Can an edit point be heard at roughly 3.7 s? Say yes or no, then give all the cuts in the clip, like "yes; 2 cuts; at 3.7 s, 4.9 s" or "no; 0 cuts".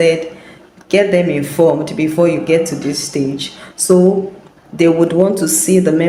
no; 0 cuts